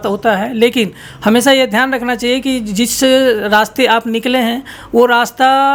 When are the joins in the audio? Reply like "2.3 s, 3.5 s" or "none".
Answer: none